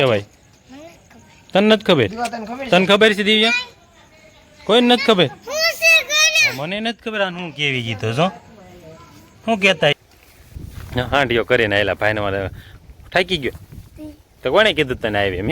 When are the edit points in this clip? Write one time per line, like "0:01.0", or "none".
0:10.0

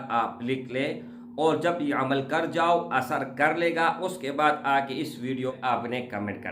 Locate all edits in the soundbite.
0:05.5

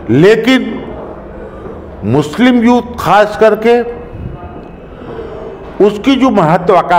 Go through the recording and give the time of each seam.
none

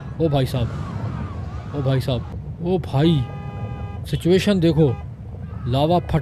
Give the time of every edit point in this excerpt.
0:02.4

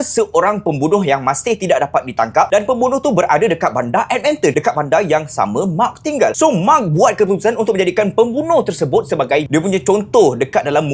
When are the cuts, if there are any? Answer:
0:09.5

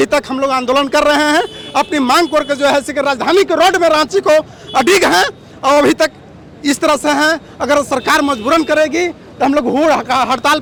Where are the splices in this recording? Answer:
none

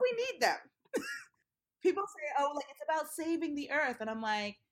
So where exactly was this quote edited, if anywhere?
0:01.7

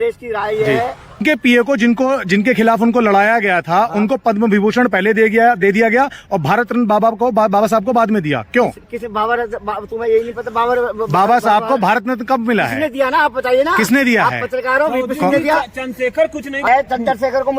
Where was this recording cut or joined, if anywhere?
0:01.2
0:16.7

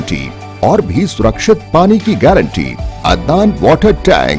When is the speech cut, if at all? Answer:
0:02.9

